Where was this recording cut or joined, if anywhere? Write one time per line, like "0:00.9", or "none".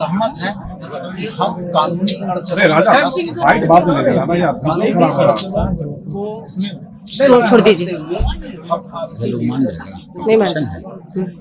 none

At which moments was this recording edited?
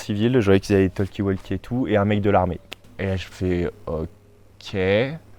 0:02.8

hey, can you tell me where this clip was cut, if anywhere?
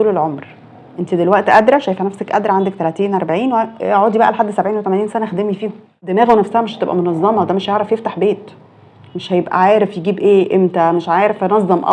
0:06.0

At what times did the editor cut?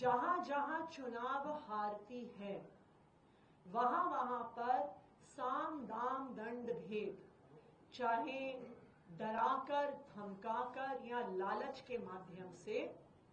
none

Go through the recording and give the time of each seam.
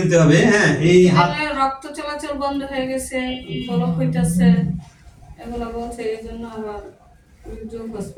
none

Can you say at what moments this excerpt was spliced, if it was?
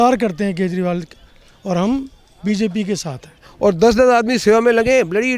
0:03.4

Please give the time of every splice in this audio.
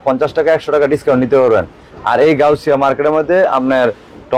none

